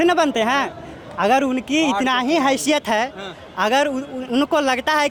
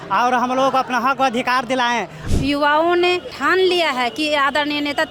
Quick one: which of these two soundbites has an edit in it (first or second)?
second